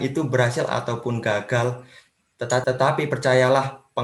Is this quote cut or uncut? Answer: cut